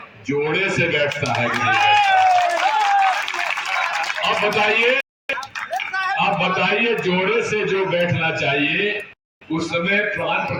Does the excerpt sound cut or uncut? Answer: uncut